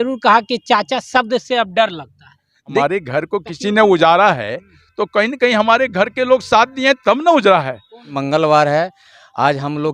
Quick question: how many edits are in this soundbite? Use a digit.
2